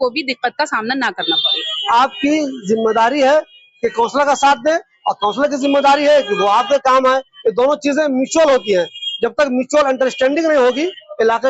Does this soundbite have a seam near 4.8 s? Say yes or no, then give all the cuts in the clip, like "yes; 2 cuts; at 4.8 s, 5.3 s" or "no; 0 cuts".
no; 1 cut; at 1.5 s